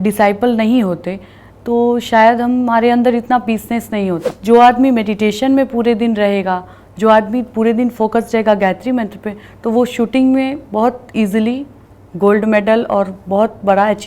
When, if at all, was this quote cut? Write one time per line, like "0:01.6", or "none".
0:04.3